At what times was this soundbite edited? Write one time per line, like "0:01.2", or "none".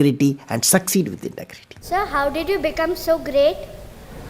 0:01.8